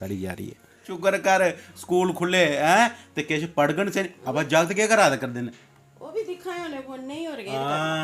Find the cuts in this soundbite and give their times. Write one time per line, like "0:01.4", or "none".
0:00.9